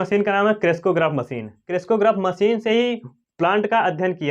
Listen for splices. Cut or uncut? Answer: cut